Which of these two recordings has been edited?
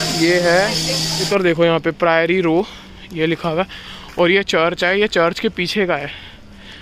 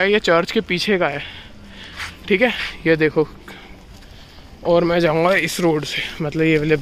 first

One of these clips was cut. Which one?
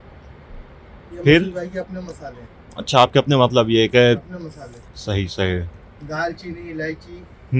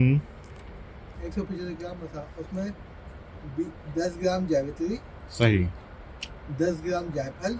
second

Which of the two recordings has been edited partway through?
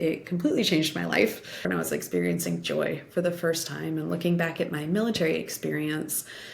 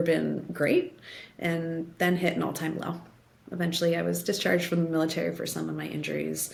first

